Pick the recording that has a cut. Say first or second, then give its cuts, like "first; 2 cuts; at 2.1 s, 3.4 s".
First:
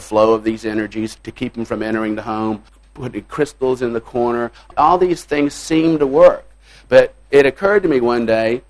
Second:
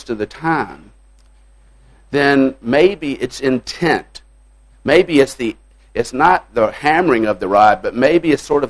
first; 4 cuts; at 1.2 s, 2.7 s, 4.7 s, 7.3 s